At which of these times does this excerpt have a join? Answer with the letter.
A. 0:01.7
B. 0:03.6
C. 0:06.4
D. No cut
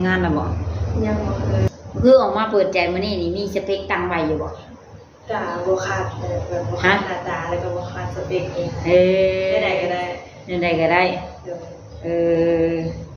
A